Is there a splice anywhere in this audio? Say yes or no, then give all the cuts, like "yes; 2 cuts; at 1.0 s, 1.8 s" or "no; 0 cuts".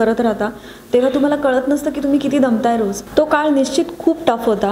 yes; 1 cut; at 3.0 s